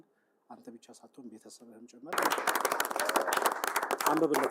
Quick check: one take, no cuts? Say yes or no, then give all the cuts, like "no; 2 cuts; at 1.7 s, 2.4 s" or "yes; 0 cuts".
no; 1 cut; at 2.2 s